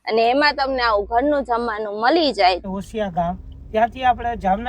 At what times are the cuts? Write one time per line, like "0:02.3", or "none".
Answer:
0:02.6